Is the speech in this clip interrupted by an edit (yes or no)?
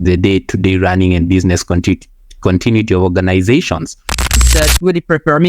yes